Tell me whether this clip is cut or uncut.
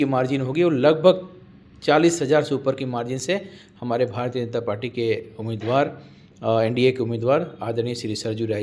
uncut